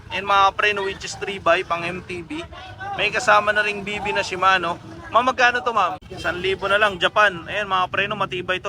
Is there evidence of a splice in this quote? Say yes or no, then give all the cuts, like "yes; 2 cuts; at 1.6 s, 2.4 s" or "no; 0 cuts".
yes; 1 cut; at 6.1 s